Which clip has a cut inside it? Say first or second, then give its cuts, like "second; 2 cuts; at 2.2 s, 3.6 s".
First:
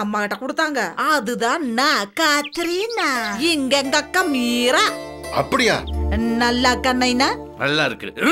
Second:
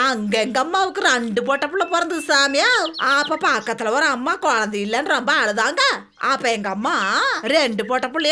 first; 1 cut; at 5.9 s